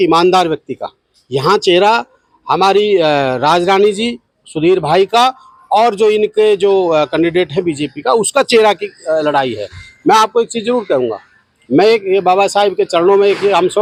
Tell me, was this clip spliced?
no; 0 cuts

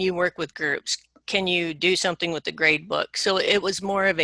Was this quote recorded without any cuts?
yes; 0 cuts

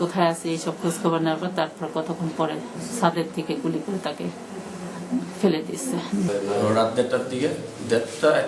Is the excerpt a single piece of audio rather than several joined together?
no; 1 cut; at 6.3 s

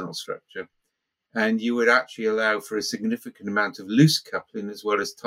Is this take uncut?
yes; 0 cuts

